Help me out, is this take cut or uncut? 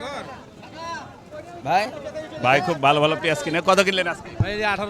uncut